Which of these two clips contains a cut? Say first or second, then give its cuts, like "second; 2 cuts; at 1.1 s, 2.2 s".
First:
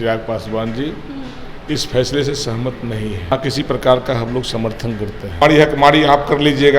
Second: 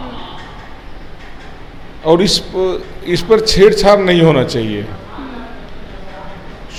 first; 2 cuts; at 3.3 s, 5.4 s